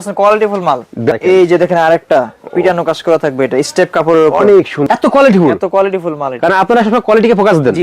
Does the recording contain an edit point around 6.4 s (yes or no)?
no